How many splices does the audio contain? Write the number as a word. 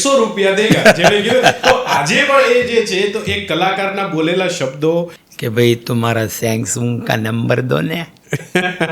one